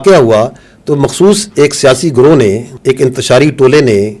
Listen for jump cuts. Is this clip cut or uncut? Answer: cut